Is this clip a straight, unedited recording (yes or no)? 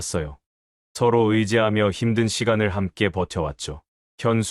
yes